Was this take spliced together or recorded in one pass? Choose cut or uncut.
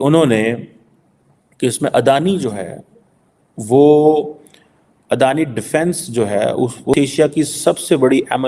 cut